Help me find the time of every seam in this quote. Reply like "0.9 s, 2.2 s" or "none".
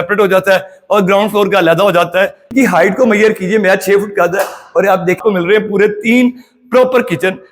2.5 s, 5.2 s